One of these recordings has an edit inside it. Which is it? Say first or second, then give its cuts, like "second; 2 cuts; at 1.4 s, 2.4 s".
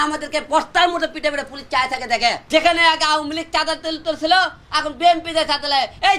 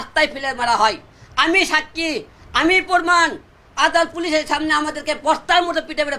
first; 1 cut; at 2.4 s